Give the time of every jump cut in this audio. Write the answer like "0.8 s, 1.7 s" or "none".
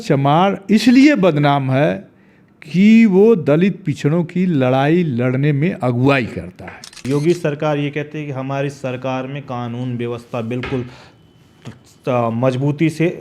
7.0 s